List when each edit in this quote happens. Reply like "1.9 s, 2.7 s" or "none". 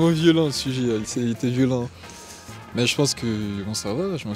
none